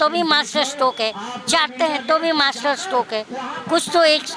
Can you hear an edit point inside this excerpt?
no; 0 cuts

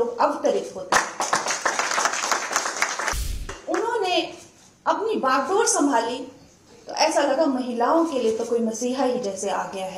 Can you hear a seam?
yes; 1 cut; at 3.5 s

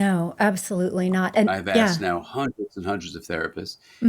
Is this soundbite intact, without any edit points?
no; 1 cut; at 1.5 s

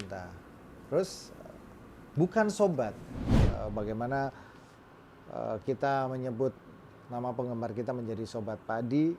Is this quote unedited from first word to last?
no; 1 cut; at 3.4 s

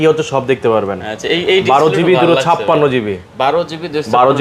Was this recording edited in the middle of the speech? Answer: no; 0 cuts

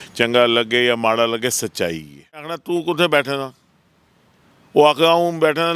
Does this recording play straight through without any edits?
no; 1 cut; at 2.6 s

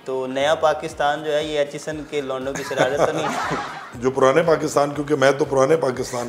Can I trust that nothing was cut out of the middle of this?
no; 1 cut; at 3.9 s

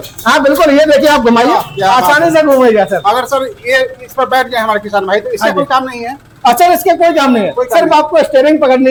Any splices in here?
no; 0 cuts

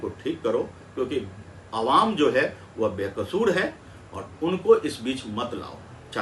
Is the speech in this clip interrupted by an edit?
no; 0 cuts

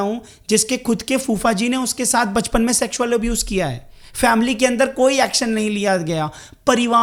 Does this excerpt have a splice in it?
no; 0 cuts

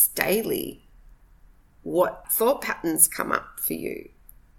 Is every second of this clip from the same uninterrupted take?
no; 1 cut; at 2.3 s

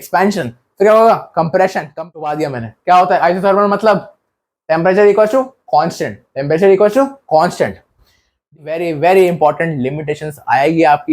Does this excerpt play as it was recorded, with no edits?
no; 2 cuts; at 1.9 s, 8.6 s

